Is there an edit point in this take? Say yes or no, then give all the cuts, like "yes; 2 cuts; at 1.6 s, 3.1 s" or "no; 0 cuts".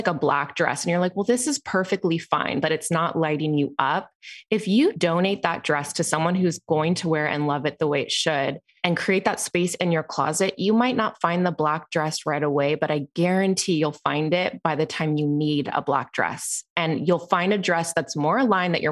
yes; 2 cuts; at 5.0 s, 8.7 s